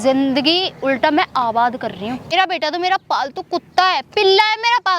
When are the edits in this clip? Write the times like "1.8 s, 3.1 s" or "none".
2.3 s